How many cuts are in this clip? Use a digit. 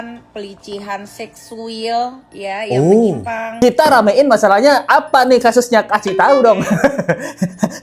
1